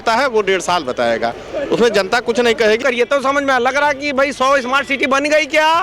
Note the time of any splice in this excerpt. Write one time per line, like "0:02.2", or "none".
0:02.8

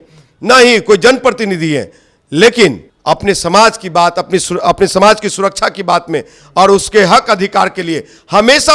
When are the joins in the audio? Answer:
0:02.9

